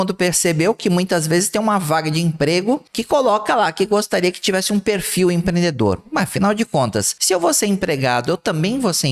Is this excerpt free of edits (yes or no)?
no